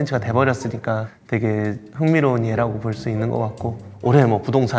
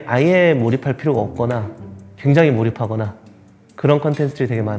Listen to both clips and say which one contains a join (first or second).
first